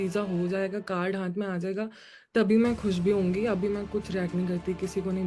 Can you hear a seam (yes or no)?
no